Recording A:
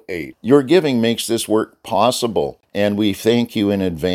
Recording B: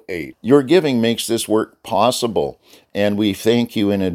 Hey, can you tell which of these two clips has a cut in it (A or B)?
A